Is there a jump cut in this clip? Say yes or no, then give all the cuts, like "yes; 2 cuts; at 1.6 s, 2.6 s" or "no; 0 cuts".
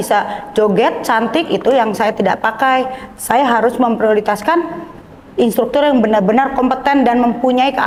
no; 0 cuts